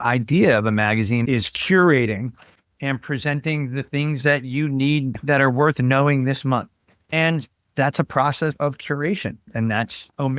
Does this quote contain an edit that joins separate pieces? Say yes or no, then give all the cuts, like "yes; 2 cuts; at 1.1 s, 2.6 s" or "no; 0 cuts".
yes; 2 cuts; at 7.0 s, 8.5 s